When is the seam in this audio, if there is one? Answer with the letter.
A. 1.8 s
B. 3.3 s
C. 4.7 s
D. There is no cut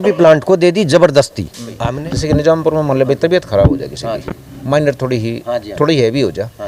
A